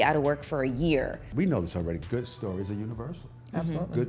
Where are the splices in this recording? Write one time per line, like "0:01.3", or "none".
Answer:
0:01.3